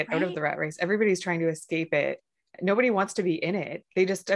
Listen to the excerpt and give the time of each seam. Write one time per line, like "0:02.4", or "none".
none